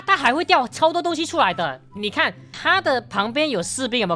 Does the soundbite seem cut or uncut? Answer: cut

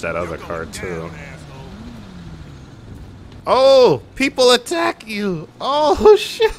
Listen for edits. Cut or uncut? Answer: uncut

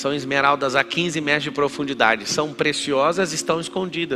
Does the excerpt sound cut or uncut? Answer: uncut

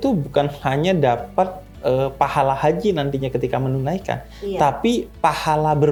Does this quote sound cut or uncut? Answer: uncut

